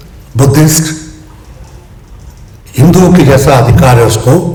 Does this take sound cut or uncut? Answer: uncut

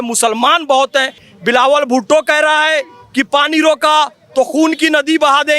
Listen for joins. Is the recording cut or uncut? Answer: cut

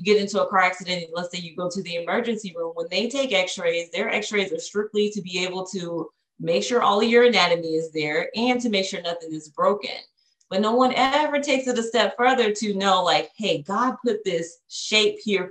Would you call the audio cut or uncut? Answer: uncut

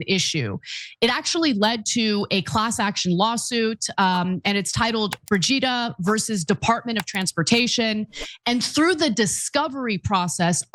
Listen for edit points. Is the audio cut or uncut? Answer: uncut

